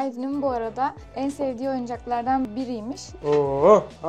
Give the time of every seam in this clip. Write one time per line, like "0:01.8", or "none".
0:03.0